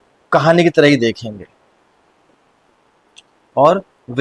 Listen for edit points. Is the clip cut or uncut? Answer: uncut